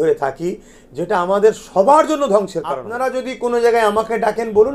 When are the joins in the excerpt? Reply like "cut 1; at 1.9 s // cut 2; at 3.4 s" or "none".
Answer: cut 1; at 2.9 s

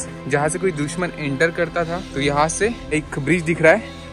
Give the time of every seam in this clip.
cut 1; at 2.1 s // cut 2; at 2.9 s

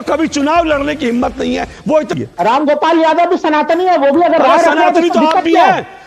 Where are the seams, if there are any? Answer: cut 1; at 2.1 s

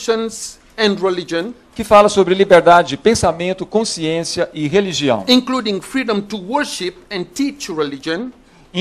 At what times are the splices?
none

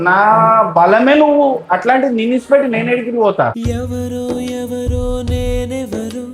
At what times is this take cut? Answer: none

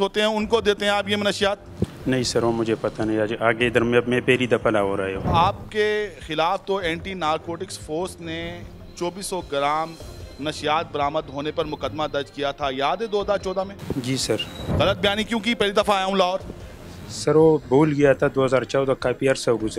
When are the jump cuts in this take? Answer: cut 1; at 5.3 s // cut 2; at 14.6 s

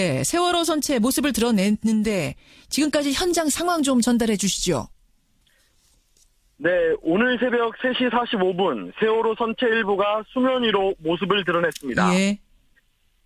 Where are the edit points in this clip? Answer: cut 1; at 4.1 s

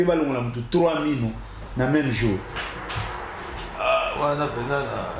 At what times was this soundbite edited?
none

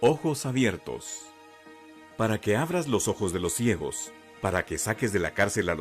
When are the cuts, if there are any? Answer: cut 1; at 2.2 s

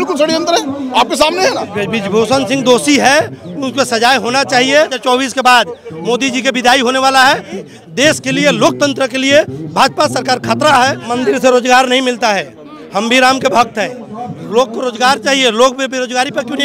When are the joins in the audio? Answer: cut 1; at 1.8 s // cut 2; at 5.0 s // cut 3; at 7.6 s // cut 4; at 11.1 s

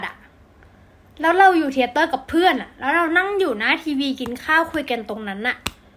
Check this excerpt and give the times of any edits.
none

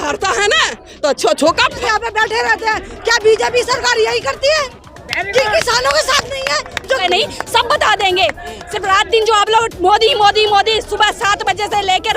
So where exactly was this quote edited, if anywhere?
cut 1; at 1.8 s // cut 2; at 7.0 s

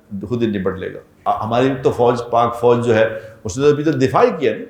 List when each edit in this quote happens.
cut 1; at 1.2 s

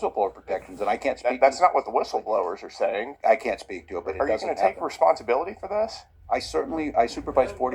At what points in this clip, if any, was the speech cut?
cut 1; at 3.0 s

